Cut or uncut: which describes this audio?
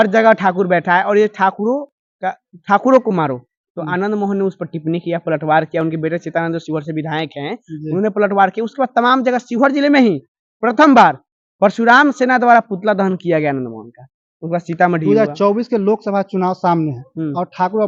uncut